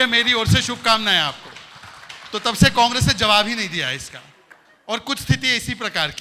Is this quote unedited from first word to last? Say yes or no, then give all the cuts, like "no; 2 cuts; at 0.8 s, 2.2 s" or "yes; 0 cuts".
yes; 0 cuts